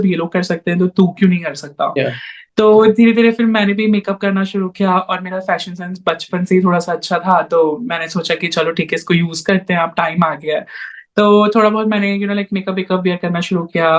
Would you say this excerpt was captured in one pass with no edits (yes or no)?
yes